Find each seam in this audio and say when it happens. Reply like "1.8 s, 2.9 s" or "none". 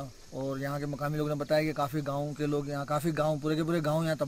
none